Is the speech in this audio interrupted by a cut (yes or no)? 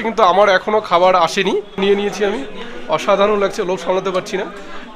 yes